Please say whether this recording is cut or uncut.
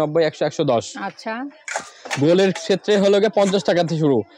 uncut